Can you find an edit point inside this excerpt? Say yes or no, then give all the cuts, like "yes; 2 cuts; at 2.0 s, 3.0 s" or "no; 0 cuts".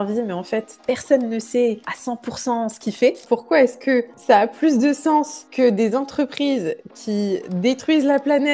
yes; 1 cut; at 3.2 s